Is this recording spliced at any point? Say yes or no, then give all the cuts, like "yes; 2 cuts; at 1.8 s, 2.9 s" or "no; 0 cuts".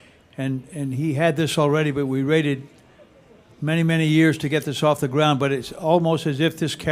no; 0 cuts